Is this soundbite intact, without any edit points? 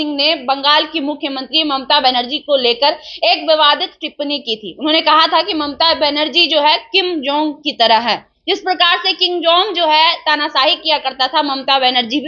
yes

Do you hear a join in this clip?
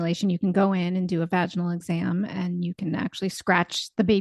no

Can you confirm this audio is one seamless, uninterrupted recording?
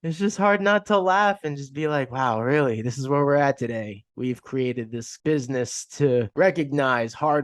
no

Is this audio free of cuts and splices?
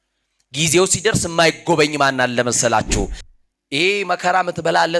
no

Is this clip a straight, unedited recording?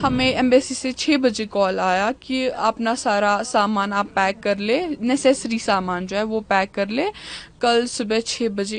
yes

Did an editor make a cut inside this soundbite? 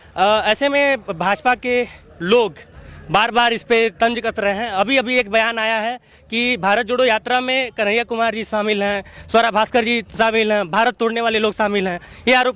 no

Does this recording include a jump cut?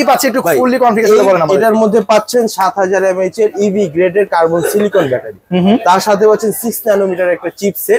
no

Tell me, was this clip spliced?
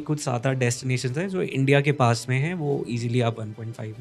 no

